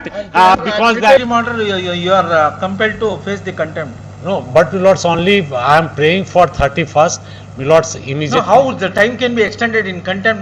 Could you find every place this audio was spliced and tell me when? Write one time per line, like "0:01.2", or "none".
0:01.2